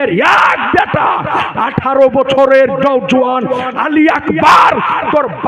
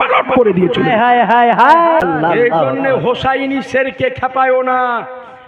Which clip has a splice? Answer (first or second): second